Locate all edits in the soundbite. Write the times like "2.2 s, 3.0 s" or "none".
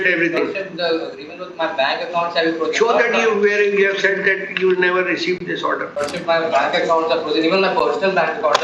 5.9 s